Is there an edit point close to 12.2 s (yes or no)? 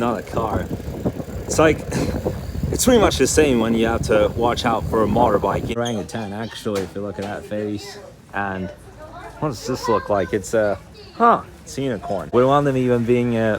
yes